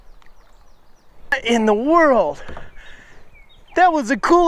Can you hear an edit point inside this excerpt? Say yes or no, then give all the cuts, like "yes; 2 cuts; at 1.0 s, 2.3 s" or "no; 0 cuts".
yes; 1 cut; at 1.3 s